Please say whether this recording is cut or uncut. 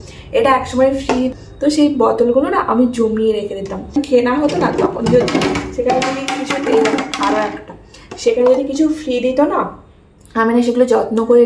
cut